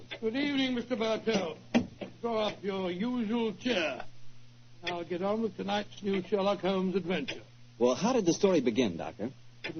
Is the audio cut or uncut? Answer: cut